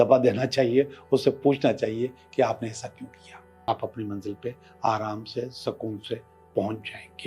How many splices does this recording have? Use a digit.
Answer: 1